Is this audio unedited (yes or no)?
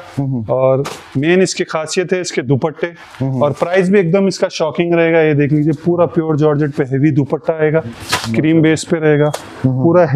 no